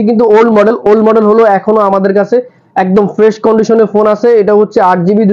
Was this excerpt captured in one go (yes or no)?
yes